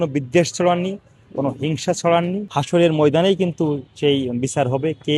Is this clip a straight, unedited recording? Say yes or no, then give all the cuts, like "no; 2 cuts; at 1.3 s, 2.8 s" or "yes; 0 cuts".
no; 1 cut; at 2.5 s